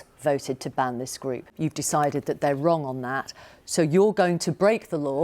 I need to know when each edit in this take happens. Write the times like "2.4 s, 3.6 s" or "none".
1.5 s